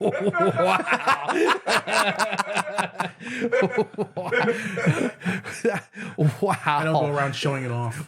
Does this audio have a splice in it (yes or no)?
no